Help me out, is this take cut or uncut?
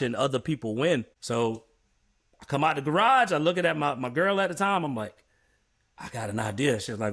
cut